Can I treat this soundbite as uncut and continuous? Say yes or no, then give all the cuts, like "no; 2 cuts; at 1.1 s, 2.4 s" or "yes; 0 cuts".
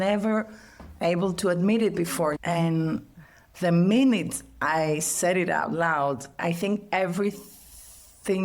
no; 1 cut; at 2.4 s